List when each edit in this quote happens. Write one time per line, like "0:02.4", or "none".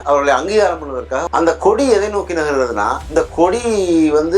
0:01.3